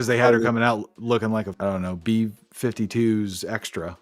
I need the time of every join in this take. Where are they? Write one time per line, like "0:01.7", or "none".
0:01.5